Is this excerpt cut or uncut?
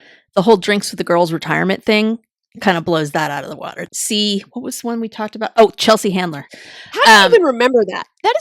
cut